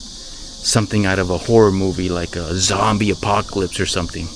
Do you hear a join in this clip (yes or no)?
no